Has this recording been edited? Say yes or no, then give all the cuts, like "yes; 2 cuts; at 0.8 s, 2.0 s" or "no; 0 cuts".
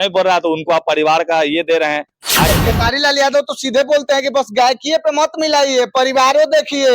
yes; 1 cut; at 2.5 s